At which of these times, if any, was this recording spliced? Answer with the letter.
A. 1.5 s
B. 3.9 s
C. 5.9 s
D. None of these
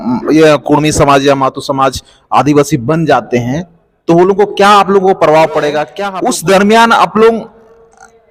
C